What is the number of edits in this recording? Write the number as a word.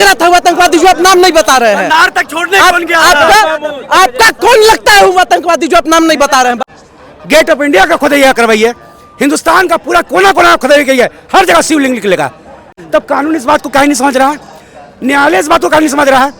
two